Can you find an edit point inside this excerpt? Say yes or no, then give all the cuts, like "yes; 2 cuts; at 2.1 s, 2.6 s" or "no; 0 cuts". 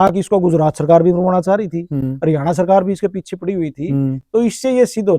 no; 0 cuts